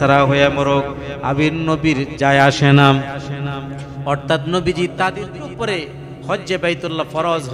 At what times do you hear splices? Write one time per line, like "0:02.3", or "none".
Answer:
0:05.3